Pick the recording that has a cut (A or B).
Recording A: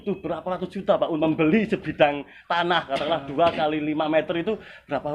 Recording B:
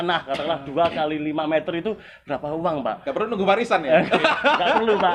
A